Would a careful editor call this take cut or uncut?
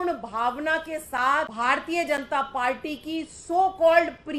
cut